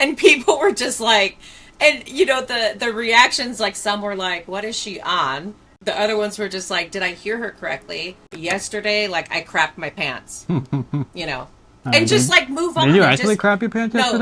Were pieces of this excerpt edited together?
yes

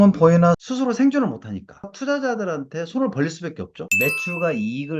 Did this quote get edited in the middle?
yes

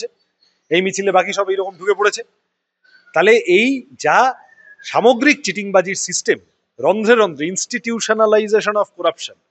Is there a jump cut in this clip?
no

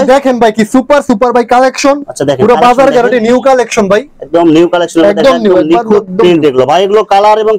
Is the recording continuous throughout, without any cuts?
yes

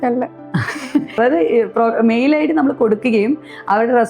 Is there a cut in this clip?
yes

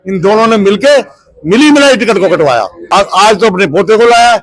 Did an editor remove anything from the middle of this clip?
yes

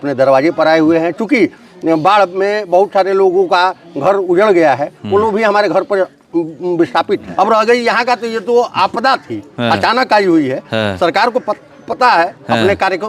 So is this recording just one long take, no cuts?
no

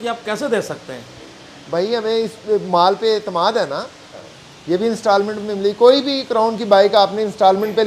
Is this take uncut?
no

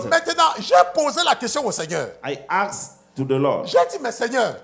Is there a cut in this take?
no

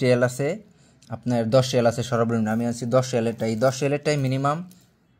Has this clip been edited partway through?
no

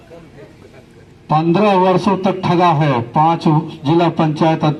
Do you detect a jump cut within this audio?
no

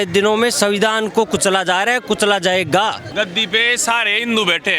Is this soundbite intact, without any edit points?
no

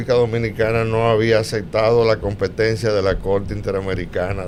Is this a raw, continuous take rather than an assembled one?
yes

